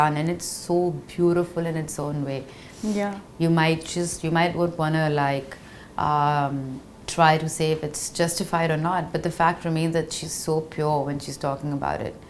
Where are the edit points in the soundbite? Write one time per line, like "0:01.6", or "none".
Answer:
none